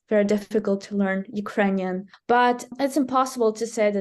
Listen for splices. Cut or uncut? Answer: cut